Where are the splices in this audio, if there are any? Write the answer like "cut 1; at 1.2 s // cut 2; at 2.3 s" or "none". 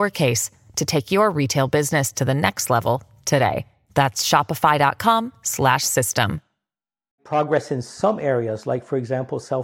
cut 1; at 7.2 s